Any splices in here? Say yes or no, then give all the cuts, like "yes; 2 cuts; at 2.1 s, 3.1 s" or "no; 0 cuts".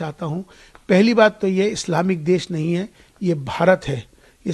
no; 0 cuts